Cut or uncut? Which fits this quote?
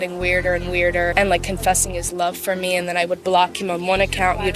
uncut